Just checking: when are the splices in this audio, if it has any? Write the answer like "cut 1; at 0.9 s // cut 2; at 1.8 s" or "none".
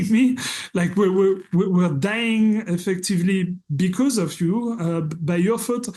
none